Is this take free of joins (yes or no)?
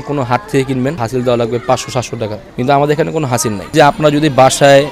no